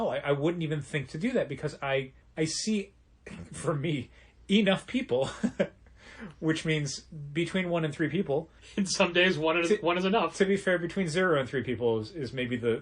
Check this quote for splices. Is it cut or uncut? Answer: cut